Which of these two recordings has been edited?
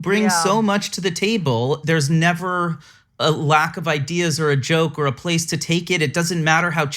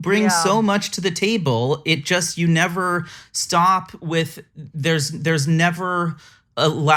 first; 1 cut; at 1.8 s

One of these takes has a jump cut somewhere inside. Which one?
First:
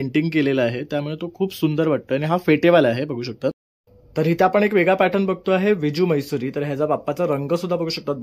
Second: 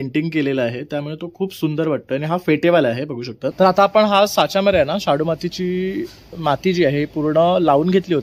second; 1 cut; at 3.5 s

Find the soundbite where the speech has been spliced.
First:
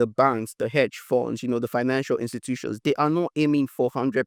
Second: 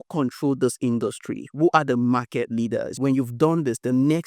second; 1 cut; at 3.0 s

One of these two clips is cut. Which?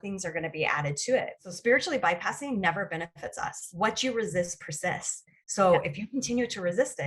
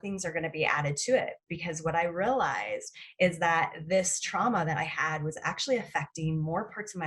first; 1 cut; at 1.4 s

